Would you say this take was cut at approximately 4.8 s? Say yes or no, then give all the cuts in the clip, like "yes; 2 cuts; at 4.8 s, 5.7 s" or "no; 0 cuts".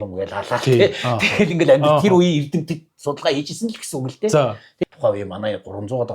yes; 1 cut; at 4.8 s